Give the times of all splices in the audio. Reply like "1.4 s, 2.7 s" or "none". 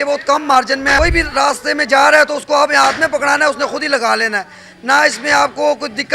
1.0 s